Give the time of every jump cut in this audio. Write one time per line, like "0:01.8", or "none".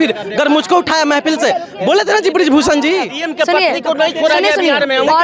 0:03.1